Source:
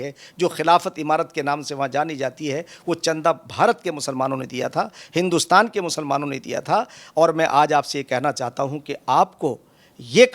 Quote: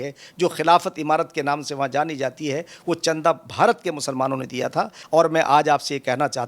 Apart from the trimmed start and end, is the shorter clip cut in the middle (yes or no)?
yes